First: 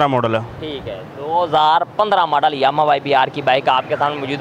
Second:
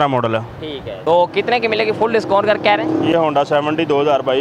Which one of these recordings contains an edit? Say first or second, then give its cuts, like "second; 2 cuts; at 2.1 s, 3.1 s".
second; 2 cuts; at 0.9 s, 3.1 s